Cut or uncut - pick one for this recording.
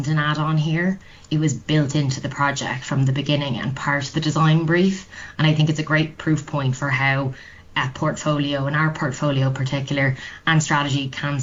uncut